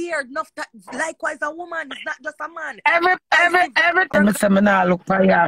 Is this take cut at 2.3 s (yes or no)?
no